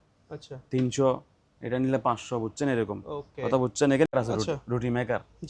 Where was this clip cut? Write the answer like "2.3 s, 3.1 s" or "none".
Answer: none